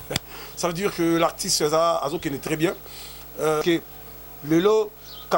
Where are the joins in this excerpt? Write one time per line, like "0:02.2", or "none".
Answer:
0:03.6